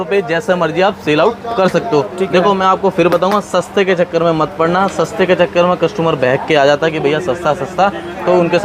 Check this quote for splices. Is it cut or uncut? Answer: uncut